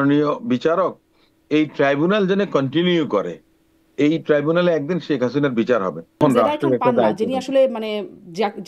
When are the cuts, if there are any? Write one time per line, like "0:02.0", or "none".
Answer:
0:06.2